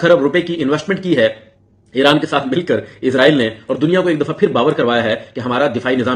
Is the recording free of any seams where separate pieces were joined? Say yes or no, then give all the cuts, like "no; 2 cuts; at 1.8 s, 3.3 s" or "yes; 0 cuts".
yes; 0 cuts